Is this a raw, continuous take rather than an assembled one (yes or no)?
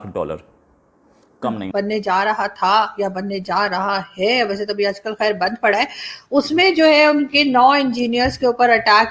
no